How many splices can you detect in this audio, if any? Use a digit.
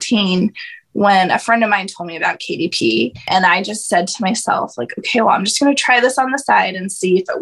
1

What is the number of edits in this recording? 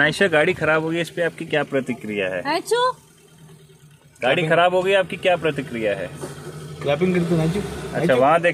0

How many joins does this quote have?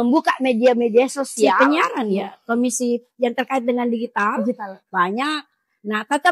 1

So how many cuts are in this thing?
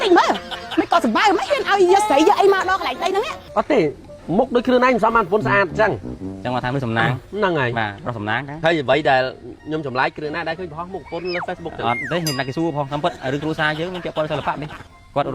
1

